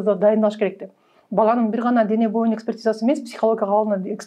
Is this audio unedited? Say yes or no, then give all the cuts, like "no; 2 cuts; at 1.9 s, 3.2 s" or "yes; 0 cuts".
yes; 0 cuts